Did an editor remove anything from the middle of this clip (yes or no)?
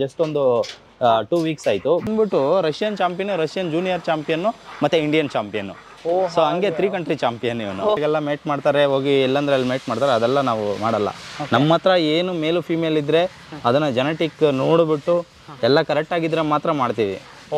yes